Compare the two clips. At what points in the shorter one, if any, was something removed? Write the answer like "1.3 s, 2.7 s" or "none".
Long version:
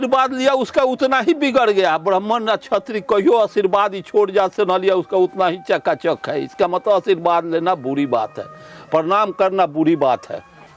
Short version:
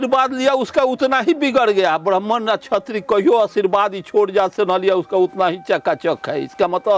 none